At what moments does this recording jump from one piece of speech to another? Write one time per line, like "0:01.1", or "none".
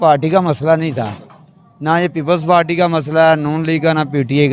none